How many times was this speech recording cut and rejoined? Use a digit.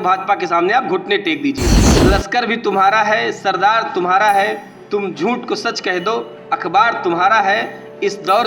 1